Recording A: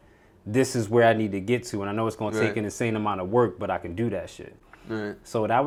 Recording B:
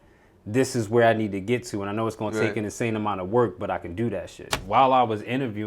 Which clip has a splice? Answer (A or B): B